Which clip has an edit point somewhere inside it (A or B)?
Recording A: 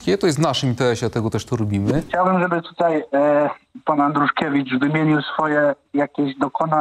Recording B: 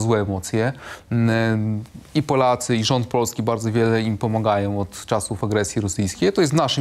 A